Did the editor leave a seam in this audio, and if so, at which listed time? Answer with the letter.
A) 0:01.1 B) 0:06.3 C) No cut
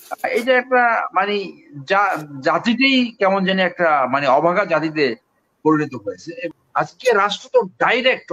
B